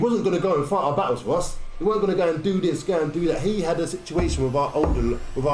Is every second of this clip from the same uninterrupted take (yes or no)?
yes